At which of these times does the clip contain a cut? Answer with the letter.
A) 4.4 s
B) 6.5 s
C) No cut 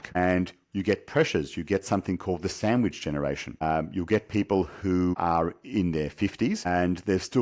C